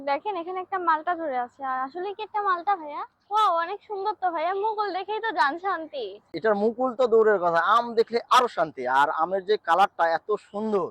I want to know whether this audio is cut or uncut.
cut